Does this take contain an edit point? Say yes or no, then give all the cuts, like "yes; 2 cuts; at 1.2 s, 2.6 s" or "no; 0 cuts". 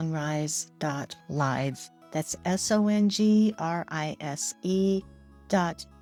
no; 0 cuts